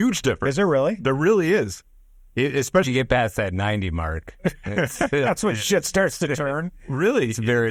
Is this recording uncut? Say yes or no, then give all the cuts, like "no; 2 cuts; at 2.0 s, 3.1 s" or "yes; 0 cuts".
yes; 0 cuts